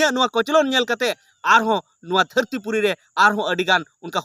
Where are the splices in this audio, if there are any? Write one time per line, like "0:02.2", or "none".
none

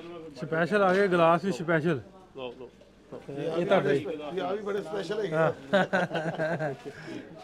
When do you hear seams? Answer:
none

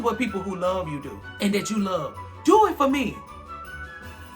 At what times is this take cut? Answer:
0:01.2

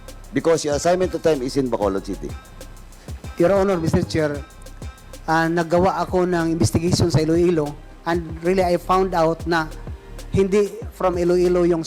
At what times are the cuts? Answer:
none

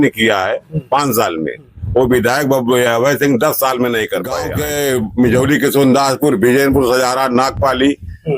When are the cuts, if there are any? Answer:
0:04.4

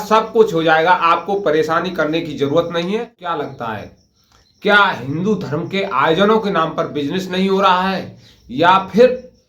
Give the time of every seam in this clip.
0:03.2

